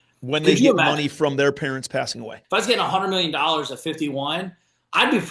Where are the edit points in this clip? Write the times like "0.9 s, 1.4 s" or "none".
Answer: 2.4 s